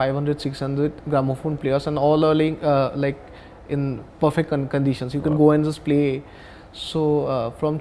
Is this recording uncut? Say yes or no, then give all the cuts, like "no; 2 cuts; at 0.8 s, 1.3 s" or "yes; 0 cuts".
yes; 0 cuts